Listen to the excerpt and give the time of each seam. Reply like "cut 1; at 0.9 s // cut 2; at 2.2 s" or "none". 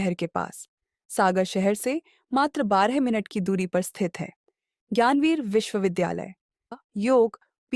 cut 1; at 6.7 s